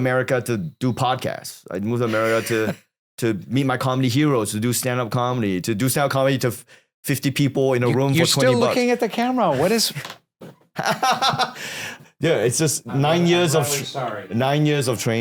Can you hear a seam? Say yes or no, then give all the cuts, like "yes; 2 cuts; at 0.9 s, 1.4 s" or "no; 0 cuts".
no; 0 cuts